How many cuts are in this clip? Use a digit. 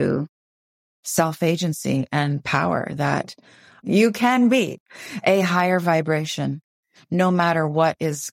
1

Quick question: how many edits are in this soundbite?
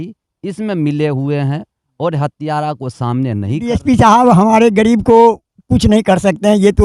1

